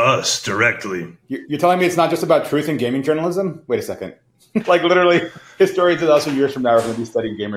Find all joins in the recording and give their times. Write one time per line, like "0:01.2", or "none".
0:01.2
0:04.6